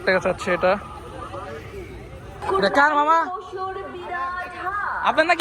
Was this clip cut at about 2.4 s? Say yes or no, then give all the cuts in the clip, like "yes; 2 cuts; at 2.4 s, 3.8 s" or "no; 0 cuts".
yes; 1 cut; at 2.4 s